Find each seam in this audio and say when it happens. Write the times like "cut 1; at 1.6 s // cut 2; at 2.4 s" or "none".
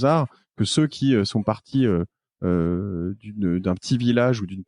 none